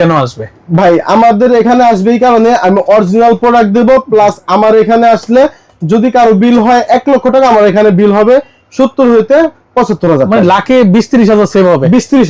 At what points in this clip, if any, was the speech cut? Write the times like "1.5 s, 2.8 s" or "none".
none

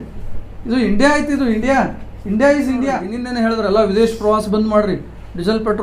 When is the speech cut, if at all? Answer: 3.2 s

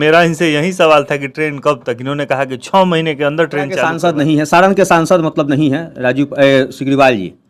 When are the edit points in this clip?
3.9 s

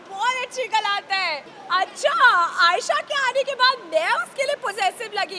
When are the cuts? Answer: 1.5 s

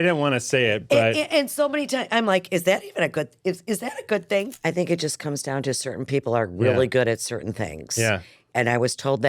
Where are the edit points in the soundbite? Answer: 4.5 s, 8.3 s

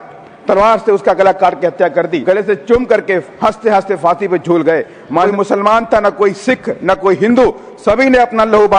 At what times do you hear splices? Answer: 2.2 s, 5.3 s

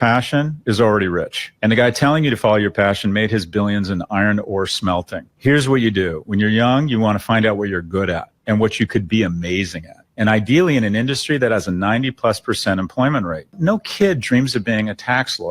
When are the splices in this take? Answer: none

